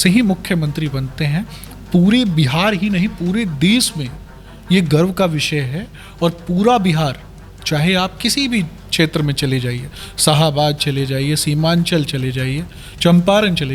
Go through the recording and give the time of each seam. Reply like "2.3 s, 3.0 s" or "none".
none